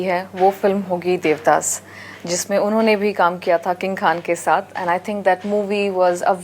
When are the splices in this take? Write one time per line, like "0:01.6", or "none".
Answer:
none